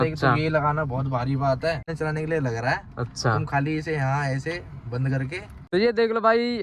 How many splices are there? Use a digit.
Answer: 2